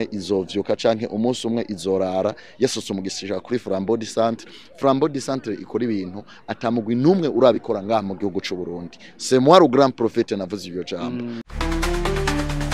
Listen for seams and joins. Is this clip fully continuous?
no; 1 cut; at 11.4 s

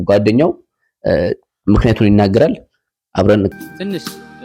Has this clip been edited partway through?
yes; 1 cut; at 3.5 s

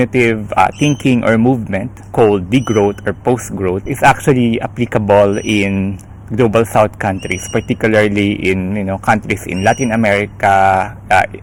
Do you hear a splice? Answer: no; 0 cuts

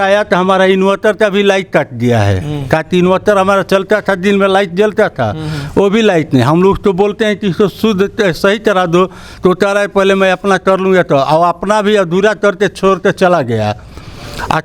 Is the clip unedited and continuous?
yes; 0 cuts

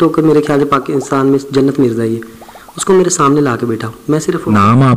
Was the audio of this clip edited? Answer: no; 0 cuts

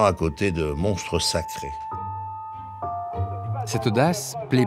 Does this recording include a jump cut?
no; 0 cuts

